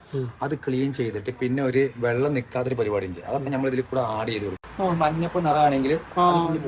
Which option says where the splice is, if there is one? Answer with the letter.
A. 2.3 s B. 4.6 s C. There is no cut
B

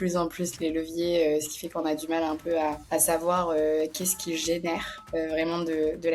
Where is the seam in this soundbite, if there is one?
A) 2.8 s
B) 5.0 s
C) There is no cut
A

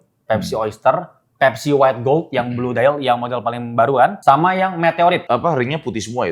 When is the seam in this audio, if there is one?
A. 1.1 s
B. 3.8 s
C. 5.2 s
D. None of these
C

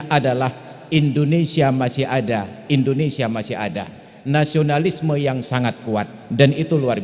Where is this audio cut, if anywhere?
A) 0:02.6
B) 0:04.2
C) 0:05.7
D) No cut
D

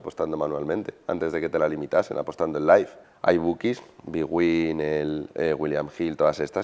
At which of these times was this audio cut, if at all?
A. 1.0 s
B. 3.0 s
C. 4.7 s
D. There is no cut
B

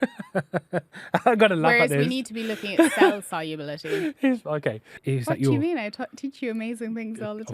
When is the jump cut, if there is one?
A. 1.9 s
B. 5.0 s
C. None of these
B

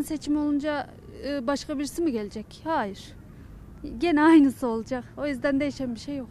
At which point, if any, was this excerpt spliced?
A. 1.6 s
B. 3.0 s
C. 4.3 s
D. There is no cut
D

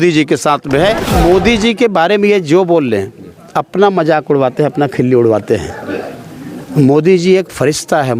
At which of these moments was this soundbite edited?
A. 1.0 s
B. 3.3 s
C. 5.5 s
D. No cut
A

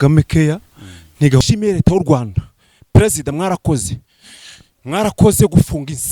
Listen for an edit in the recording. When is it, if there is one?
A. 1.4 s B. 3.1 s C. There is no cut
A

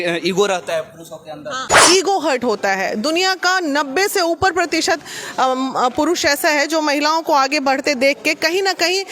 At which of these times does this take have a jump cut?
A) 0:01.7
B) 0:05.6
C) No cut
A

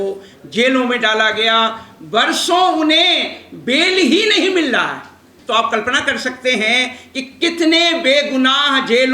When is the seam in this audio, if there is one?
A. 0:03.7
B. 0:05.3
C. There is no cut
B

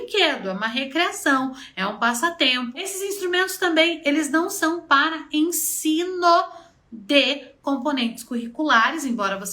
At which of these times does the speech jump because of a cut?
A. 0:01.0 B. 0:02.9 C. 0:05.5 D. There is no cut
B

